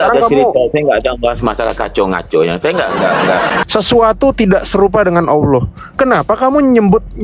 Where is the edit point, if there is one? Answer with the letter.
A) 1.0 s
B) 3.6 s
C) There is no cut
B